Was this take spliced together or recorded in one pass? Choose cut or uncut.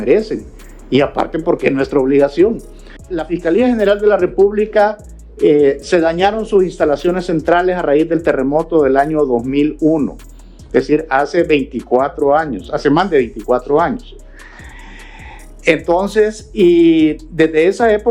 cut